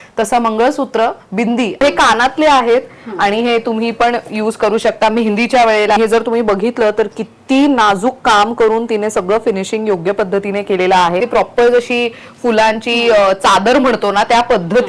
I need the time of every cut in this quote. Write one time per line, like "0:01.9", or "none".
0:01.8
0:06.0
0:11.2